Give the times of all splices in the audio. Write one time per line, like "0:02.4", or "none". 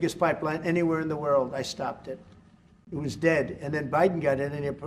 none